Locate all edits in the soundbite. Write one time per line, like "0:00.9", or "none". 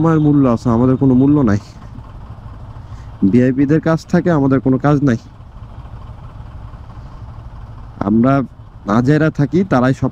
none